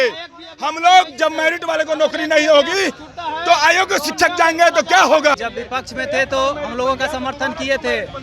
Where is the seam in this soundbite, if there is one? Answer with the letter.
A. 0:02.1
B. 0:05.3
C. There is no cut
B